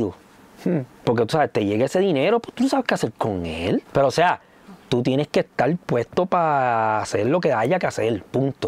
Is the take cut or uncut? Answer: cut